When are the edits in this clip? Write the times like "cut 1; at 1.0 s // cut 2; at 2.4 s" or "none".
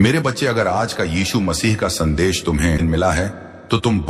cut 1; at 2.8 s

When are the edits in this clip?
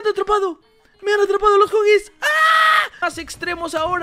cut 1; at 3.0 s

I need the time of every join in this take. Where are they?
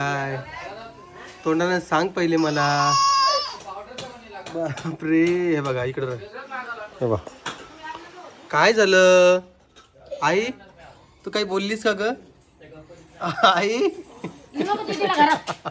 none

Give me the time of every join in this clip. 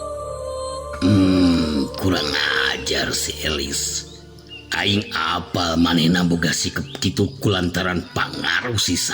cut 1; at 1.0 s

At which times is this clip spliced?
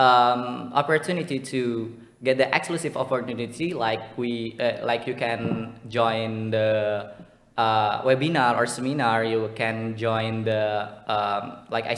none

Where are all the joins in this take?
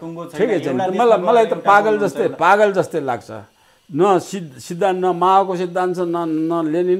none

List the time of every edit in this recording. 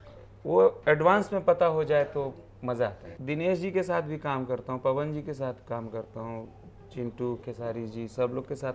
cut 1; at 3.1 s

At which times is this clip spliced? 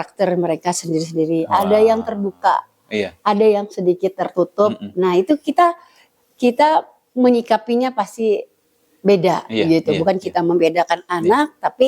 none

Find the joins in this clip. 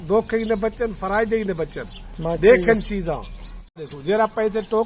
cut 1; at 3.6 s

